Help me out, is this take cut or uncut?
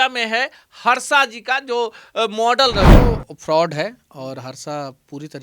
cut